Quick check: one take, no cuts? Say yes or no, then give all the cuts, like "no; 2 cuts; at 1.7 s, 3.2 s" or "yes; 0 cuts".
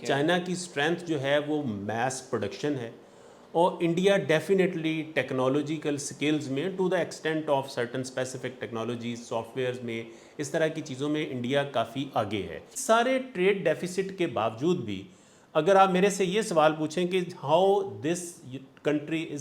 no; 1 cut; at 12.7 s